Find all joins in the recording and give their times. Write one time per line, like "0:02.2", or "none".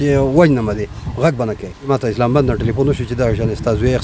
0:01.9